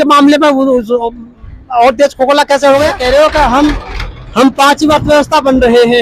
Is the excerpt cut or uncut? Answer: cut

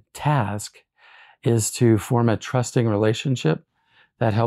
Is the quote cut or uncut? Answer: uncut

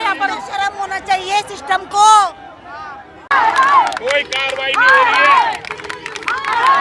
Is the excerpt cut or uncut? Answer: cut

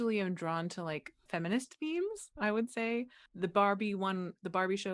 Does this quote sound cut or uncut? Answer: cut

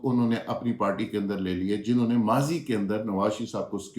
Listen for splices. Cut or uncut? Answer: uncut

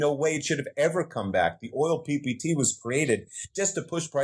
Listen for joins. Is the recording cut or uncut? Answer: uncut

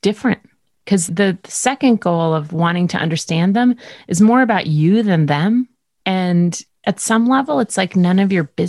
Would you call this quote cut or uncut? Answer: cut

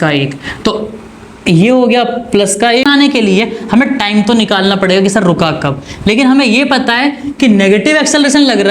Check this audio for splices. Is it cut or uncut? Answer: cut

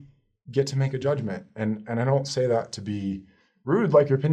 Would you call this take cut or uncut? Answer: uncut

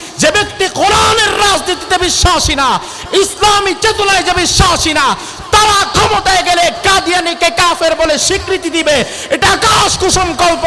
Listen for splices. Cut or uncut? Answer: uncut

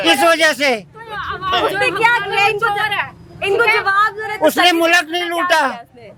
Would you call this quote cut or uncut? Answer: uncut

